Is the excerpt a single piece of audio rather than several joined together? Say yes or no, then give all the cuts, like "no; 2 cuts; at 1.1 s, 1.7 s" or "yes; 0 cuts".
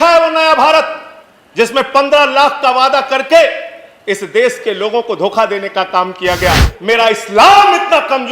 no; 1 cut; at 6.7 s